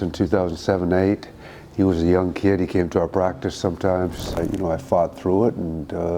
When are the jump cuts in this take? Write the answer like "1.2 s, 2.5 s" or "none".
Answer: 4.4 s